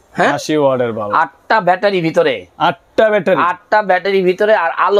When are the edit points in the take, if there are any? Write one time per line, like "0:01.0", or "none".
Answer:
none

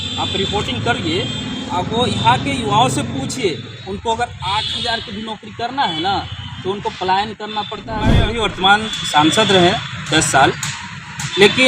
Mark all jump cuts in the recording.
0:08.3

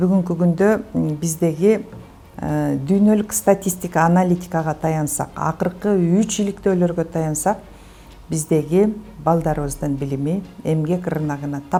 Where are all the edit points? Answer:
none

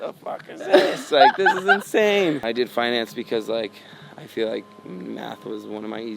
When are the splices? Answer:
0:02.4

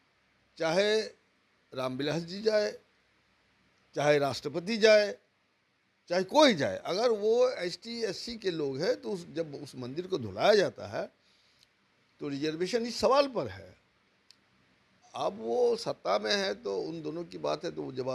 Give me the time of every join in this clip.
none

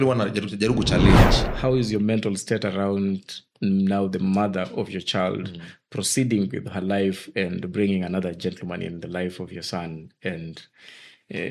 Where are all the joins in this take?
0:01.4

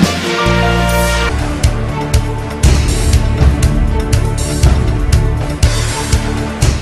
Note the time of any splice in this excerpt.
0:00.9

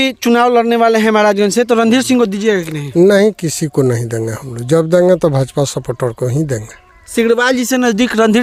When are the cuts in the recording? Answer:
none

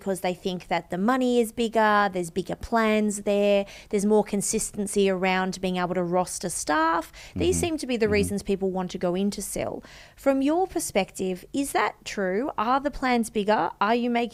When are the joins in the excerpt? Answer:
none

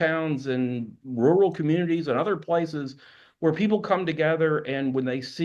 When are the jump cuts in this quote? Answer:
0:00.9

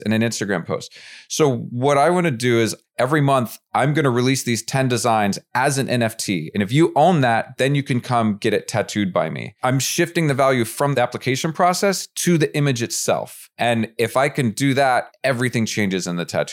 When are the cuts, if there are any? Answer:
0:02.8
0:06.5
0:09.5
0:10.9
0:13.4
0:15.1

